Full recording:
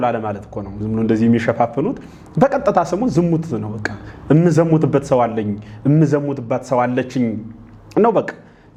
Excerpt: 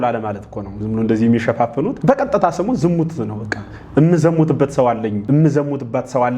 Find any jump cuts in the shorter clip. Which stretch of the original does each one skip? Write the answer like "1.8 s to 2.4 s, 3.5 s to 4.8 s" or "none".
2.0 s to 2.3 s, 5.5 s to 5.8 s